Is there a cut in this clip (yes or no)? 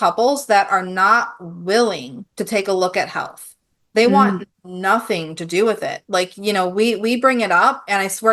no